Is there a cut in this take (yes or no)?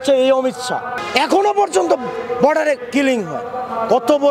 yes